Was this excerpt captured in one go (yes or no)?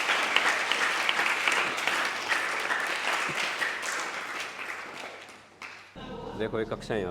no